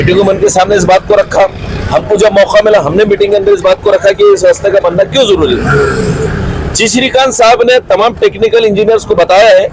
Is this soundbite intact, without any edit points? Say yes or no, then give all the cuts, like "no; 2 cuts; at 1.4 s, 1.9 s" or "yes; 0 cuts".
yes; 0 cuts